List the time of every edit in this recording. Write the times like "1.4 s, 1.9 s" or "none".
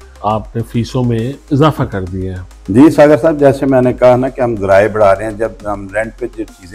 none